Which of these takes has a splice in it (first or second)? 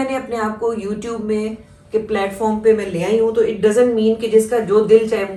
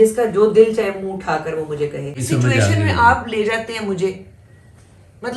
second